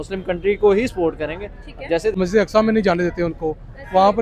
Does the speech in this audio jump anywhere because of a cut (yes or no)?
yes